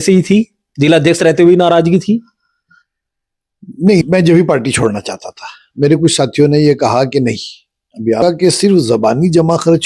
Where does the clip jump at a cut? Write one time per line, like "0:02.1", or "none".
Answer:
0:04.0
0:08.2